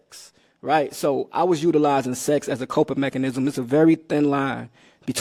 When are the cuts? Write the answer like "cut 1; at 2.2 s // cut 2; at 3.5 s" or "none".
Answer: none